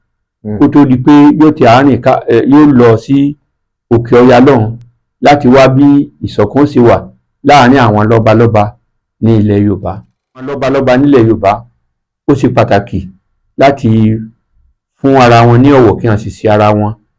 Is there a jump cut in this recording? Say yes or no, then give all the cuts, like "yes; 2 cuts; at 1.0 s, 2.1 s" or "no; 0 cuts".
yes; 1 cut; at 10.6 s